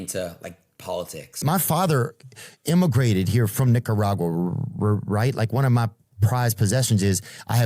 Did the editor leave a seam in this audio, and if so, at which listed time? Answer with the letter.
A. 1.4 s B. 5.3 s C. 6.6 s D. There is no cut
A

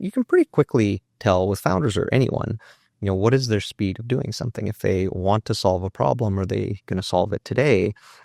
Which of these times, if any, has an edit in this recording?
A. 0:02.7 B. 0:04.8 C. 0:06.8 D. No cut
D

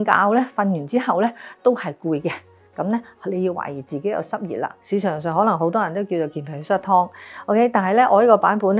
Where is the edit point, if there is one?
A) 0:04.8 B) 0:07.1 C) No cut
A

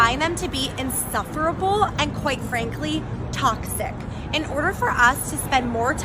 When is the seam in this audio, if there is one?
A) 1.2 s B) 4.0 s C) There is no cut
C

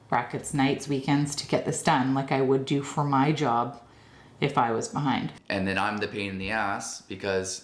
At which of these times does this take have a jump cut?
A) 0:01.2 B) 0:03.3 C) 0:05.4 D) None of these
C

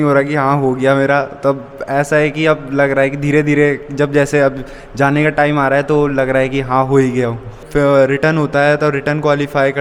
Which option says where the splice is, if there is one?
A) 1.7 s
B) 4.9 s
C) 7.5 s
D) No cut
C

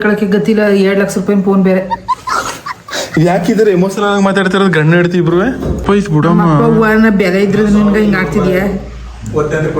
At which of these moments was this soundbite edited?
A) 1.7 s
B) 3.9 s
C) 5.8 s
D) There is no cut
C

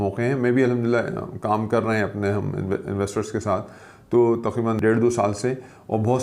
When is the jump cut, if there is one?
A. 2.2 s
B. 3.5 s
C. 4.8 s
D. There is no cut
C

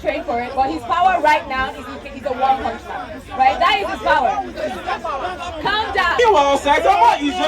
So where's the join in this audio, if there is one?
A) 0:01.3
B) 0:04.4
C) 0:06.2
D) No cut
C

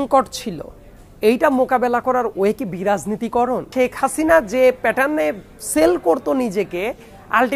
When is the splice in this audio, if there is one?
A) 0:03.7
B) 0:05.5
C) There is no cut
A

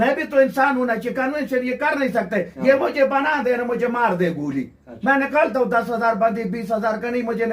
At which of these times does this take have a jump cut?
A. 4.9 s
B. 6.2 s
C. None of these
C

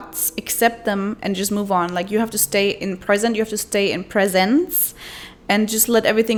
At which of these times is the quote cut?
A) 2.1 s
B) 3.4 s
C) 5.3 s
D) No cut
D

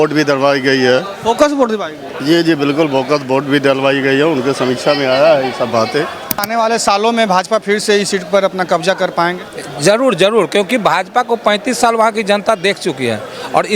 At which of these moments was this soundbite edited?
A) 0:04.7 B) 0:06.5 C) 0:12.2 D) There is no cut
B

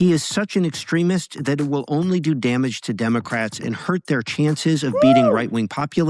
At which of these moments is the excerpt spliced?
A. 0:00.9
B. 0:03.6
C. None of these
B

